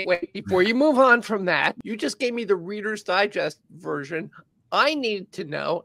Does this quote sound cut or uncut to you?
cut